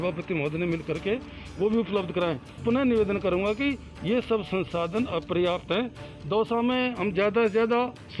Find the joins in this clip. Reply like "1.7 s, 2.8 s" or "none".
2.6 s